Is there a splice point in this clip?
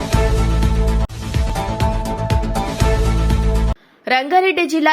yes; 2 cuts; at 1.1 s, 3.8 s

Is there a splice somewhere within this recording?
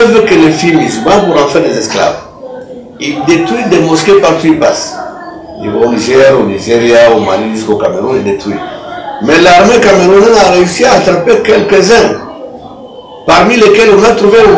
no; 0 cuts

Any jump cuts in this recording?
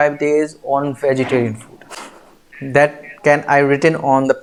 no; 0 cuts

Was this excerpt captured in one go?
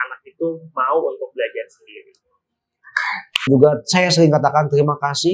no; 1 cut; at 3.5 s

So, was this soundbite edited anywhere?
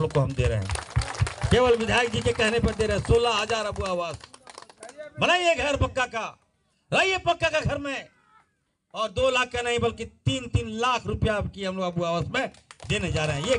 no; 0 cuts

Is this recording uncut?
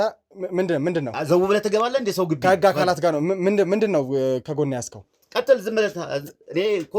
yes; 0 cuts

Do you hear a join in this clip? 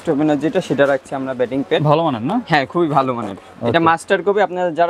no; 0 cuts

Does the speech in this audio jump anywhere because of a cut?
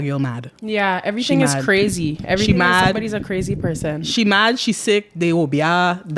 no; 0 cuts

